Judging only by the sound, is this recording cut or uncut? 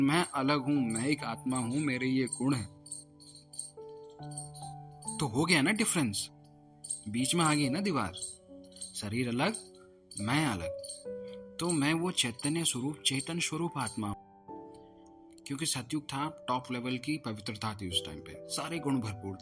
cut